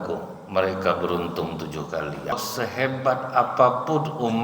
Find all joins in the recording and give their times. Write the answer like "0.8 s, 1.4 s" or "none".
2.3 s